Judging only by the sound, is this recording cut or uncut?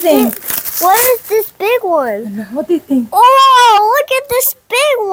uncut